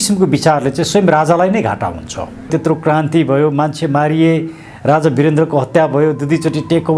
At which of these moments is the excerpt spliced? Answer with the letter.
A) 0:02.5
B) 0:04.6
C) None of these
A